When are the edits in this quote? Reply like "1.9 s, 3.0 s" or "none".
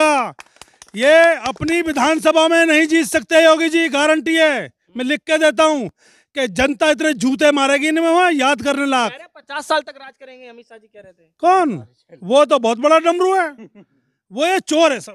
none